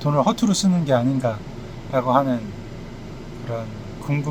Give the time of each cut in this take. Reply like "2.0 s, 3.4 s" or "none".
none